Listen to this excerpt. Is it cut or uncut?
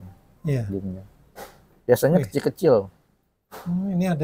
uncut